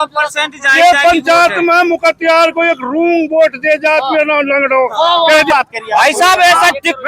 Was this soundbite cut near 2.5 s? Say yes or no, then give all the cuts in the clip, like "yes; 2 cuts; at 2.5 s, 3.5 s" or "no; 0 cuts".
no; 1 cut; at 5.5 s